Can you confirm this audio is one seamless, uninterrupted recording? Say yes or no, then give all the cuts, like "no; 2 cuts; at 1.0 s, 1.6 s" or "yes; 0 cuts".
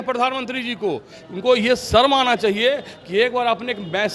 yes; 0 cuts